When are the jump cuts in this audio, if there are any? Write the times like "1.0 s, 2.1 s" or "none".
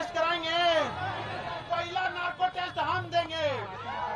none